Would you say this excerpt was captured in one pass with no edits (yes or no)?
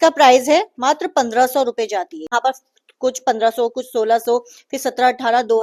no